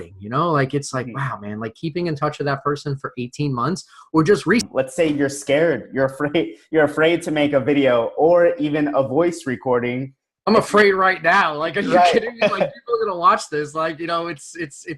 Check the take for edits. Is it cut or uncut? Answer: cut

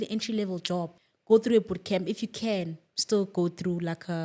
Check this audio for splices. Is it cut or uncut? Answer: cut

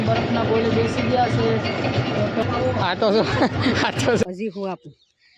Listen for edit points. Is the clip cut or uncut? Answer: cut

